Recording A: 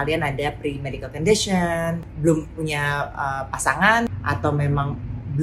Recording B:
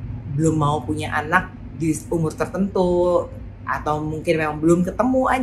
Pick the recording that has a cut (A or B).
A